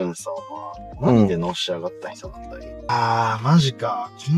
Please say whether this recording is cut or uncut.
cut